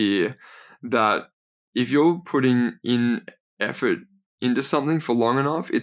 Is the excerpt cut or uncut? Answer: uncut